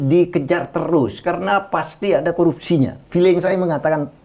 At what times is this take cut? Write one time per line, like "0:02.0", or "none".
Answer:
none